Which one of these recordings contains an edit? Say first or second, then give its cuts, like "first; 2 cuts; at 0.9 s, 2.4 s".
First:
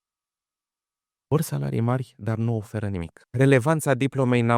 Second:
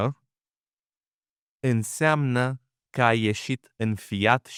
first; 1 cut; at 3.2 s